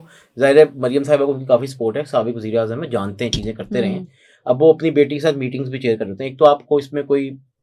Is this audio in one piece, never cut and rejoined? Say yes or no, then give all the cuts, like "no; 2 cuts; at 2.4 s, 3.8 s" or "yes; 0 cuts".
yes; 0 cuts